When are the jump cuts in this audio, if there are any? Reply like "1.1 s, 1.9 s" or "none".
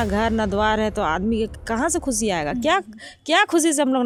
none